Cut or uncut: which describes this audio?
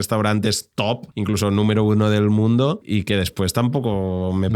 cut